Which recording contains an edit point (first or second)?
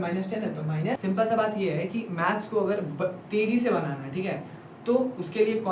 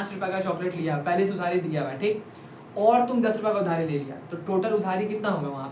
first